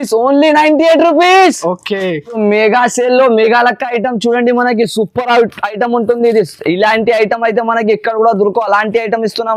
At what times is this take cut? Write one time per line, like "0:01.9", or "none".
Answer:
none